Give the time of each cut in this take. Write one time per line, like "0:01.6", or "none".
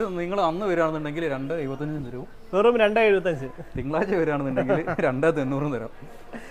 none